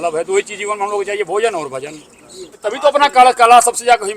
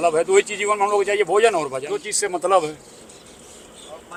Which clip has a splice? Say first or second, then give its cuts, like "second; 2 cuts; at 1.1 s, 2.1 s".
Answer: first; 1 cut; at 1.9 s